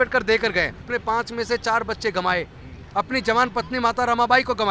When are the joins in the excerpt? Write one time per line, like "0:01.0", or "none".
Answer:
0:00.9